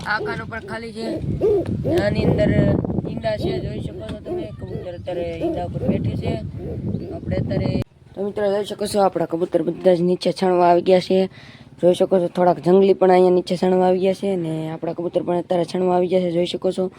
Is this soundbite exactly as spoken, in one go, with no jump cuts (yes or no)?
no